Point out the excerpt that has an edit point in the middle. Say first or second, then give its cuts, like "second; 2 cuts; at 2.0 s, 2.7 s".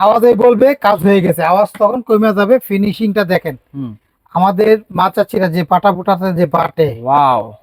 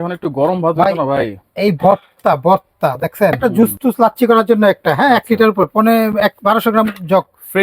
second; 1 cut; at 3.5 s